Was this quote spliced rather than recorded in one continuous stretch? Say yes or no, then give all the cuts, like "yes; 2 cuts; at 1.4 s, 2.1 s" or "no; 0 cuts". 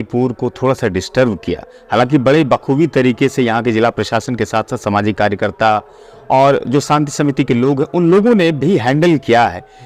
no; 0 cuts